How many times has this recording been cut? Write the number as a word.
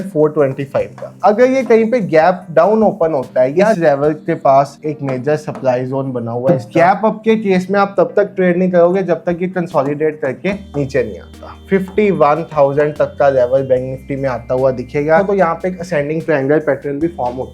five